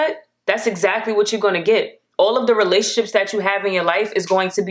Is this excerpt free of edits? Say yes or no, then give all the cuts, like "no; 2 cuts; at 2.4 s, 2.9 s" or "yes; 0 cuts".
yes; 0 cuts